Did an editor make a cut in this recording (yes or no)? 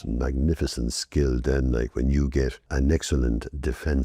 yes